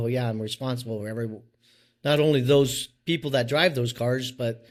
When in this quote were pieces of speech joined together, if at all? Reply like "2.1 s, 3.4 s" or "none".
none